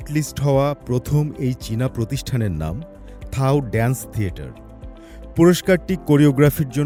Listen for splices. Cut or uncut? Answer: uncut